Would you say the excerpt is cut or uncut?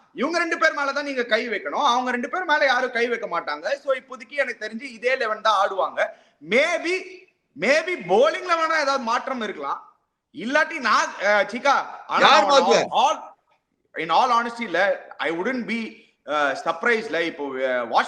uncut